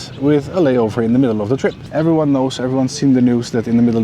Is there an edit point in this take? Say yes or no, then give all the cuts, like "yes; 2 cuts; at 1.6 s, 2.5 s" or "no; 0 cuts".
yes; 1 cut; at 1.8 s